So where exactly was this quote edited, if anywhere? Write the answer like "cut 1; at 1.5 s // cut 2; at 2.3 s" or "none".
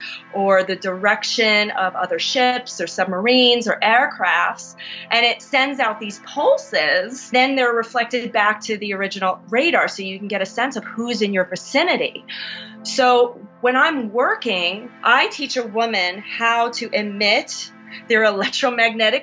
cut 1; at 7.3 s // cut 2; at 14.8 s // cut 3; at 18.0 s